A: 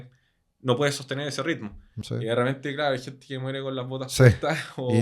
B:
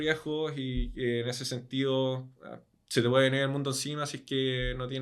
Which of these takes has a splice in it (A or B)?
A